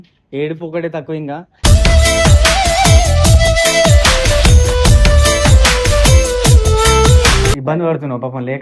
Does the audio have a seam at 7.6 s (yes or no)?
yes